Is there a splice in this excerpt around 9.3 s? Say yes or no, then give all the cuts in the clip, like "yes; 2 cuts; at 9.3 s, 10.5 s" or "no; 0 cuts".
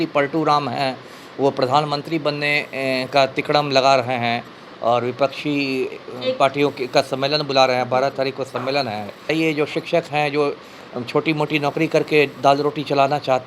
yes; 1 cut; at 9.3 s